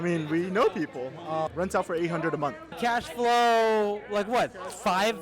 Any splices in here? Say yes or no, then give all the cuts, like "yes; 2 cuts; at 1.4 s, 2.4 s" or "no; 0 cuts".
yes; 2 cuts; at 1.5 s, 2.7 s